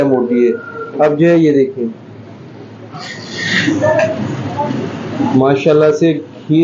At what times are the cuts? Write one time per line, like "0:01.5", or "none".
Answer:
none